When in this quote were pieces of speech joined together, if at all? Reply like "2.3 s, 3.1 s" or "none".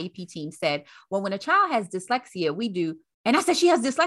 3.1 s